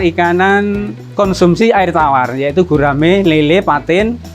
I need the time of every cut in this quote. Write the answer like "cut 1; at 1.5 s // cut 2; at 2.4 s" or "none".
cut 1; at 1.0 s